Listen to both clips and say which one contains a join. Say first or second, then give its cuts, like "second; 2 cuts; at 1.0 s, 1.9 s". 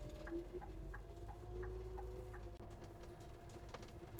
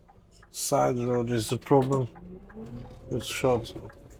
first; 1 cut; at 2.6 s